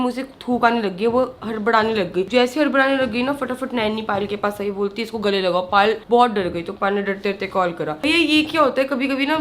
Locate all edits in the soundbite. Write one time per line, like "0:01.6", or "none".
none